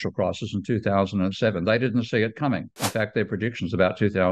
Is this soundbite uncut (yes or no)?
yes